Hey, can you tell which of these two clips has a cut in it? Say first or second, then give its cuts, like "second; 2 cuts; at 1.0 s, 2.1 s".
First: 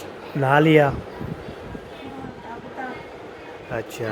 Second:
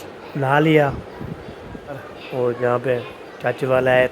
second; 1 cut; at 2.1 s